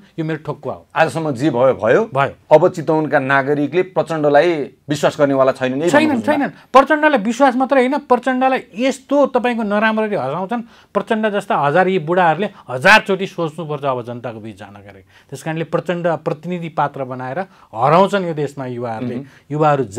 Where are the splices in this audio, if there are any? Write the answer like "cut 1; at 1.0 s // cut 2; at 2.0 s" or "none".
none